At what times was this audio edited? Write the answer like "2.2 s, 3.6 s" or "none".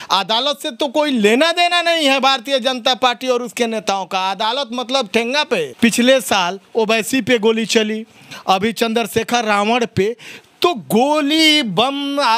5.7 s

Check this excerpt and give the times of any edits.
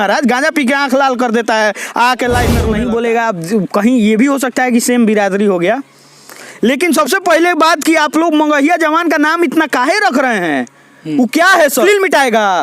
2.8 s, 11.8 s

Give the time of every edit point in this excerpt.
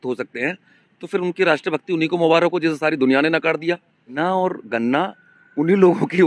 4.2 s

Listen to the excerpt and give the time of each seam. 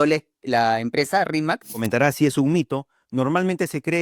1.8 s

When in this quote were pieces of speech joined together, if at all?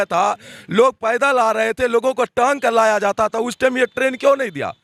none

